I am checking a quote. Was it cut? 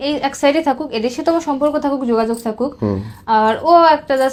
no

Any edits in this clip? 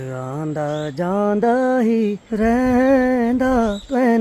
no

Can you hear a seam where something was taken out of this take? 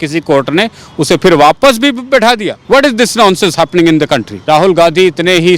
yes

